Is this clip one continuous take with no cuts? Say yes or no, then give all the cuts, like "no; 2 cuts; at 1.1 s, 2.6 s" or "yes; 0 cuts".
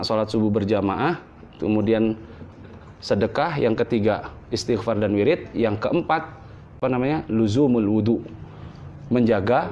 no; 2 cuts; at 2.3 s, 6.6 s